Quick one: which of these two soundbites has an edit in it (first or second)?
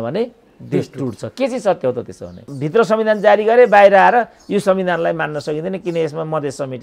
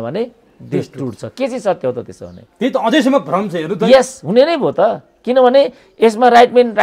first